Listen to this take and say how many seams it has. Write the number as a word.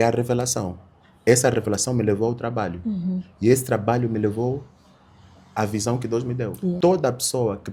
zero